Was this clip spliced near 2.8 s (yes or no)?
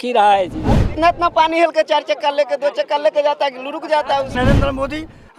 no